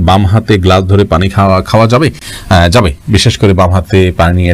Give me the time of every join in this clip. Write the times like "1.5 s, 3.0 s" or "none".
none